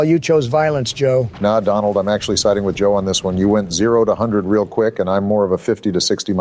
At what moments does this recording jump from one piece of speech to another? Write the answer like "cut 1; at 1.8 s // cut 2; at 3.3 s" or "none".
cut 1; at 1.3 s